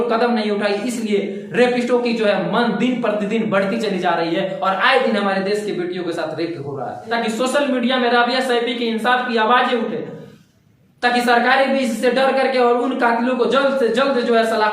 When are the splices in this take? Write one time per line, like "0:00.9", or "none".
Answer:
0:07.1